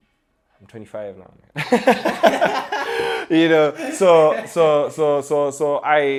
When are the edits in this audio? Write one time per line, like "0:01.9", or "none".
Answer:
none